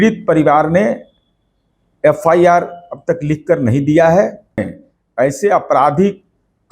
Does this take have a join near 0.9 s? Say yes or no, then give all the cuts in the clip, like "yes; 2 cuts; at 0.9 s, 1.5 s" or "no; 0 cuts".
no; 1 cut; at 4.6 s